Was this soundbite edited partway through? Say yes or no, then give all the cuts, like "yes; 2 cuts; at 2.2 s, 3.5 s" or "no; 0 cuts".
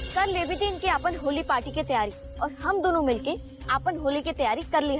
no; 0 cuts